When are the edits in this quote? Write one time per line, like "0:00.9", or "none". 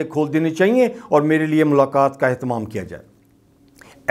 none